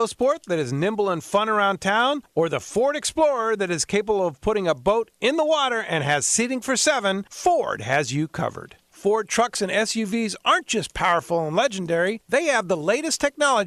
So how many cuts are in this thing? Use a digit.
0